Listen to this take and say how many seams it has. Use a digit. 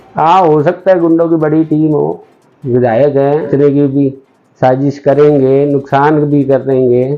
1